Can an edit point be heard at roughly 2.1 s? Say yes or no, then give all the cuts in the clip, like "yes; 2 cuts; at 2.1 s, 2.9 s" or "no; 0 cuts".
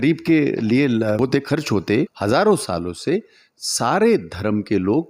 yes; 2 cuts; at 1.2 s, 2.1 s